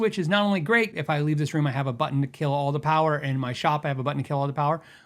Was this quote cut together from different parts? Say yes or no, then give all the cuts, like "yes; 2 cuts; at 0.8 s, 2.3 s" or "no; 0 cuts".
yes; 1 cut; at 0.9 s